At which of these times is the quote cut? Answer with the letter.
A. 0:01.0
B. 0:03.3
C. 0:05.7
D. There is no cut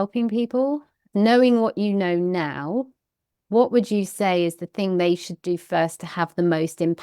A